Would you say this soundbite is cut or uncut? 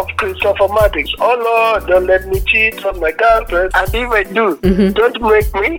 uncut